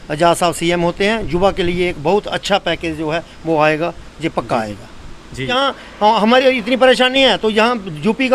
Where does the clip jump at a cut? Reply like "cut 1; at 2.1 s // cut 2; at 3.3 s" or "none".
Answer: cut 1; at 5.5 s